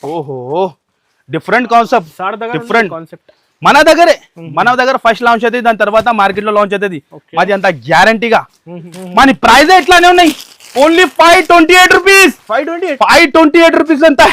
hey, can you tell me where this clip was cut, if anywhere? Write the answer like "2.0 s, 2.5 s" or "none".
9.0 s